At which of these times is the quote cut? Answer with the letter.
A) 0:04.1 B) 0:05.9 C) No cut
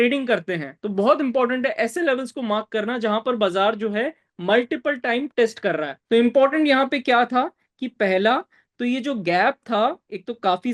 B